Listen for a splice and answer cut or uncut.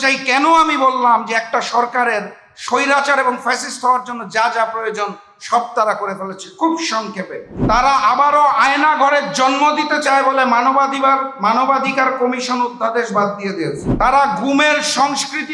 cut